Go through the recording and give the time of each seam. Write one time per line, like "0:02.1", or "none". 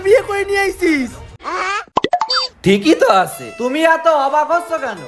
none